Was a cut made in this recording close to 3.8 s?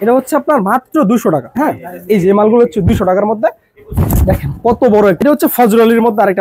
no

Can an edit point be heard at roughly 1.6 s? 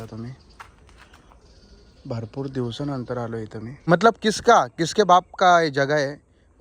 no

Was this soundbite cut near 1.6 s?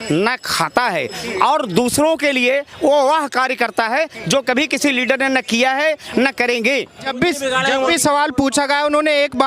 no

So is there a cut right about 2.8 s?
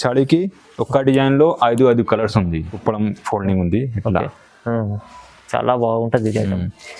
yes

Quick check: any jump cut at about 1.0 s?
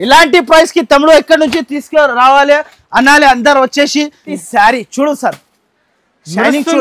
no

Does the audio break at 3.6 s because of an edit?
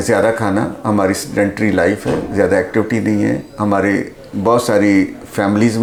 no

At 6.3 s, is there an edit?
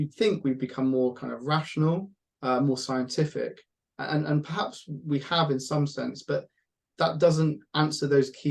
no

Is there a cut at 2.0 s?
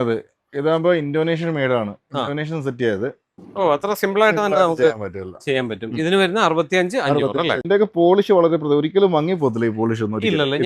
no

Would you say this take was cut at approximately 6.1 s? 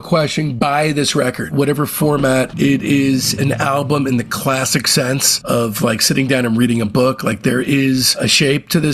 no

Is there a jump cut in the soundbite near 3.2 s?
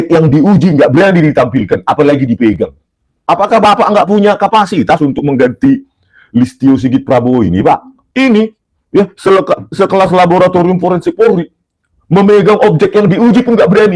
yes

